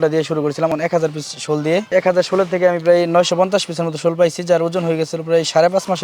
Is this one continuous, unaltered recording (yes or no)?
no